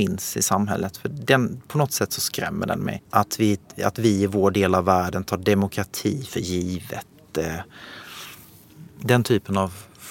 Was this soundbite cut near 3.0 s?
yes; 1 cut; at 3.0 s

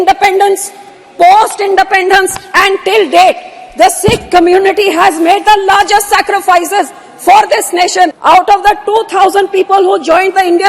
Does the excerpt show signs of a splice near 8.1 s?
yes; 1 cut; at 8.1 s

